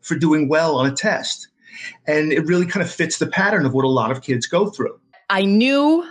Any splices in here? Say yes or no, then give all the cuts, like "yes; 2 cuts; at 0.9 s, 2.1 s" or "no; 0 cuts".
yes; 1 cut; at 5.2 s